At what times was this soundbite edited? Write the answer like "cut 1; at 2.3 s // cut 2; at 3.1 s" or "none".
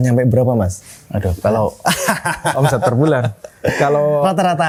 none